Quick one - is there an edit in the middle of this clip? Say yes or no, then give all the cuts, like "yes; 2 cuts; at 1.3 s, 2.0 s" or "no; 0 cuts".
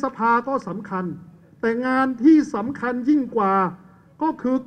no; 0 cuts